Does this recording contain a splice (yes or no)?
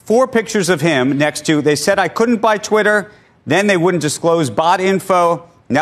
no